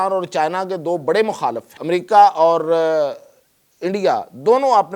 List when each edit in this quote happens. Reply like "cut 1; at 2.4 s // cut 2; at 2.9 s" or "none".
cut 1; at 1.7 s

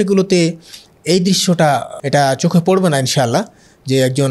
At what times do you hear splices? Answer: cut 1; at 1.9 s

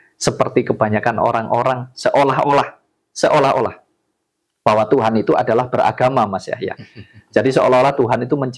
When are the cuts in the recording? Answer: none

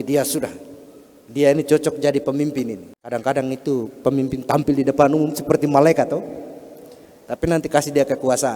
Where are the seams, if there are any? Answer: cut 1; at 2.9 s

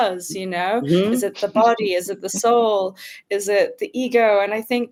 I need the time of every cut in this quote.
none

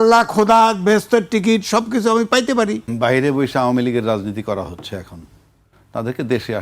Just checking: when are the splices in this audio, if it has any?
cut 1; at 2.9 s

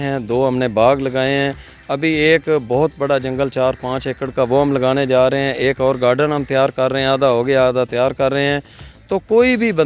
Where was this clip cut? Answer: none

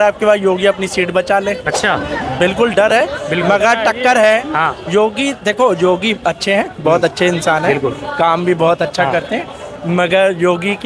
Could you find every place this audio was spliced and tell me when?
none

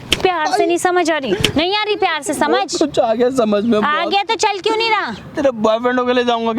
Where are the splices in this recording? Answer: none

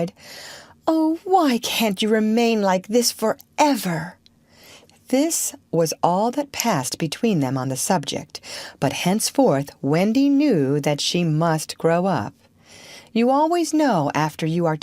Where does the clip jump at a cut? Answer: cut 1; at 6.3 s

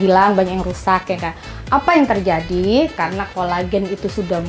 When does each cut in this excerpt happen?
none

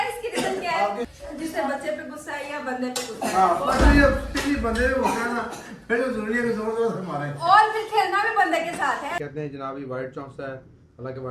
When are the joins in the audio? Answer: cut 1; at 1.1 s // cut 2; at 9.1 s

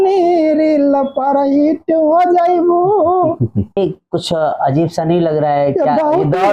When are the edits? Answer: cut 1; at 3.8 s

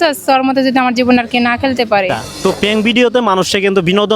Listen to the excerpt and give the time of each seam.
cut 1; at 2.2 s

